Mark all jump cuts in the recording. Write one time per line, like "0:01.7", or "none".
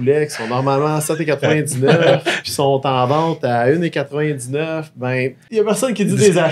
0:05.5